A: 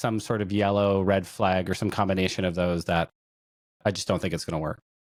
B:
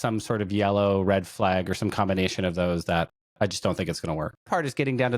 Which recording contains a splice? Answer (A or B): B